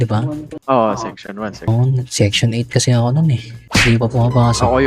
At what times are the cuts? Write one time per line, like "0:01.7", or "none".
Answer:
0:01.7